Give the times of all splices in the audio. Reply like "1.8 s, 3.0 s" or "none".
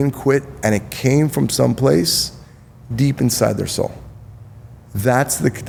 none

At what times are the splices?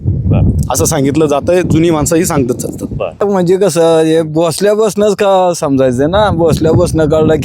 3.2 s

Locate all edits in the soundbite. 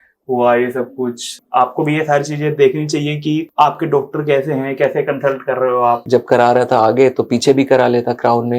1.4 s, 6.0 s

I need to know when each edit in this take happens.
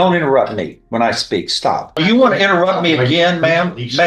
1.9 s

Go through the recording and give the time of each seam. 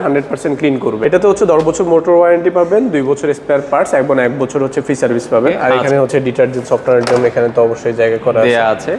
1.0 s, 5.6 s

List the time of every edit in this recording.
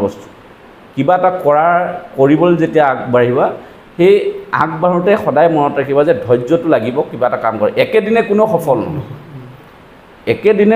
none

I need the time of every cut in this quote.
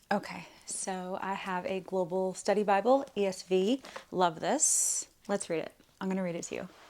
5.2 s

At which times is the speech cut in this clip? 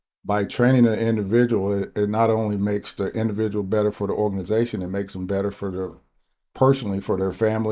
none

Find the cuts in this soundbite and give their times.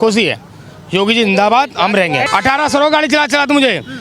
2.3 s

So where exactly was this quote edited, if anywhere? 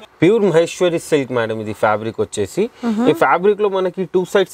none

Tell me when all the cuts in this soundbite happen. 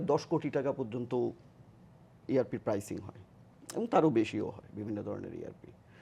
none

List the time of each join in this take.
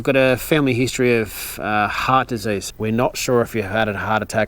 2.7 s

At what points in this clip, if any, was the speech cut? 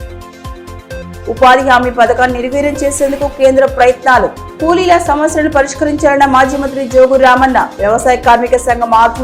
none

